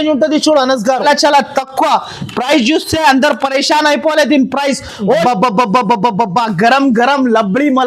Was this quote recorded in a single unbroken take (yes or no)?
no